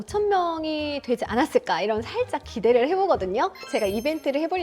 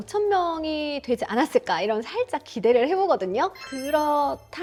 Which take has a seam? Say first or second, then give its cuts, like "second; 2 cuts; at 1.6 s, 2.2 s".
first; 1 cut; at 3.7 s